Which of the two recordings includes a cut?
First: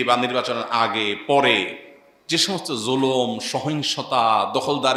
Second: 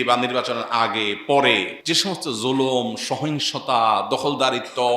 second; 1 cut; at 1.7 s

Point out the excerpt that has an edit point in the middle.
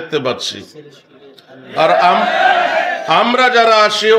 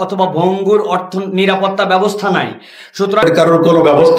second; 1 cut; at 3.2 s

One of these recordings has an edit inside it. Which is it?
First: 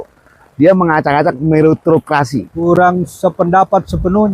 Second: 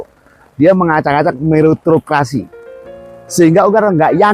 first; 1 cut; at 2.6 s

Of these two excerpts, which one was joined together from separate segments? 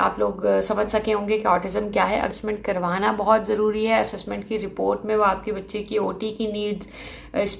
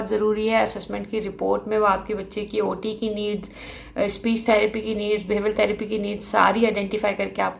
first; 1 cut; at 2.3 s

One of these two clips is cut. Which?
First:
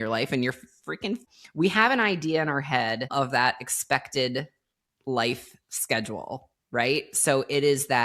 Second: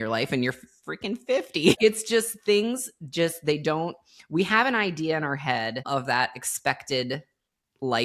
first; 1 cut; at 1.2 s

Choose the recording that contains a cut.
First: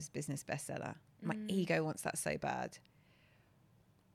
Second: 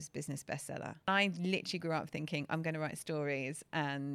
second; 1 cut; at 1.1 s

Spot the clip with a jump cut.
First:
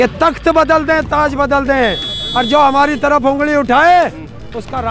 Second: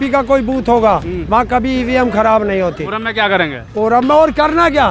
second; 1 cut; at 2.9 s

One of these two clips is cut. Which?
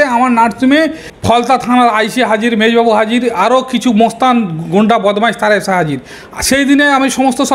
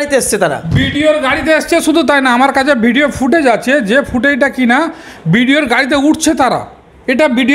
first; 1 cut; at 1.1 s

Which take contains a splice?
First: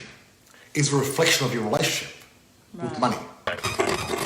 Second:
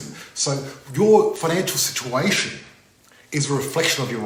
first; 1 cut; at 3.3 s

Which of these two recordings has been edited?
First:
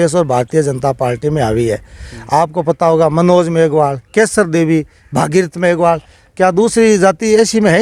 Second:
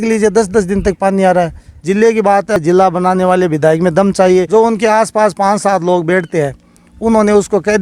second; 3 cuts; at 1.7 s, 2.6 s, 4.5 s

